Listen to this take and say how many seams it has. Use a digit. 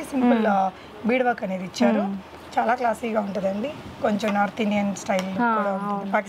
0